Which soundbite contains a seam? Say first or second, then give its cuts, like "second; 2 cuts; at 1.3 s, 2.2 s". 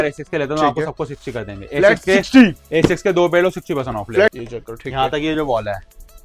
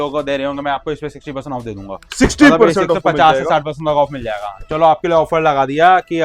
first; 1 cut; at 4.3 s